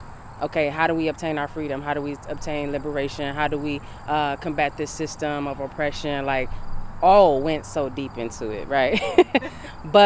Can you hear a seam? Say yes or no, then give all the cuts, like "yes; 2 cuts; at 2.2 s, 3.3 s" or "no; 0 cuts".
no; 0 cuts